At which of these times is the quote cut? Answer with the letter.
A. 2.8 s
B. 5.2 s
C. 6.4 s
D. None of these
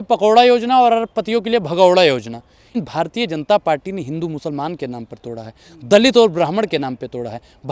A